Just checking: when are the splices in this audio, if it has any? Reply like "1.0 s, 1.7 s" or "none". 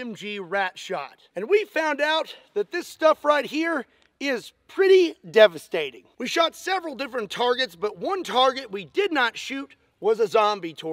none